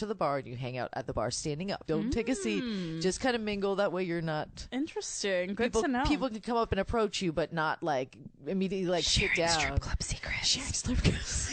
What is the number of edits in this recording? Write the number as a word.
two